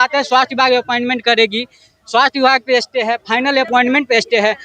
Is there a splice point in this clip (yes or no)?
no